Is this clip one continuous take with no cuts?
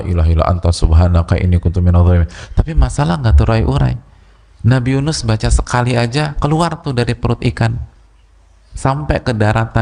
yes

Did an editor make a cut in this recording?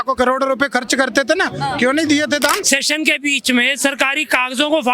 yes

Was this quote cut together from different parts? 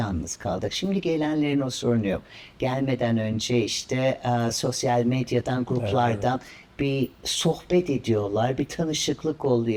no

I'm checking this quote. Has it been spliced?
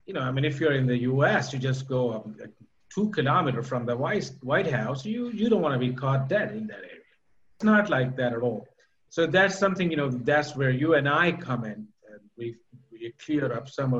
yes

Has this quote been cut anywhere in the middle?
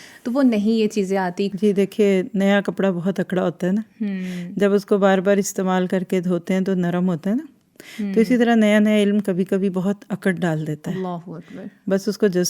yes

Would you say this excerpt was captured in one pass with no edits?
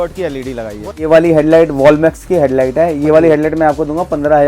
no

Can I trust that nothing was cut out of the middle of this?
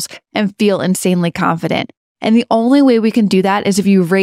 yes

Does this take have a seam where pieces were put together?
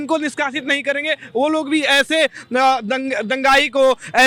no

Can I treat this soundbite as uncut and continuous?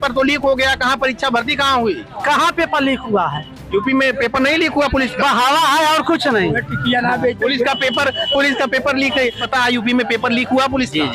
no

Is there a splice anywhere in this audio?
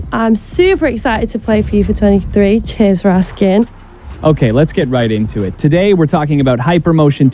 yes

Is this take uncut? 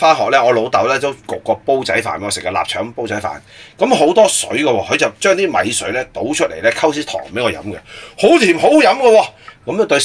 yes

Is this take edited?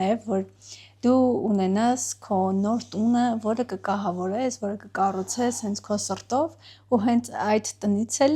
no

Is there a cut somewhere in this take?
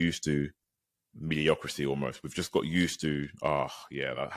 no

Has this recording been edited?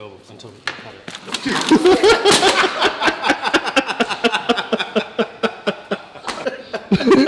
yes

